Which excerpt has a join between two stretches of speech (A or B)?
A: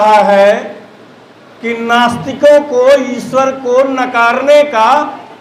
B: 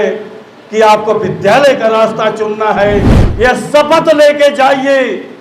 B